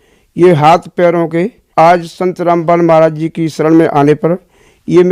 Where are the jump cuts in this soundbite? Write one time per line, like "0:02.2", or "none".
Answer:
0:01.6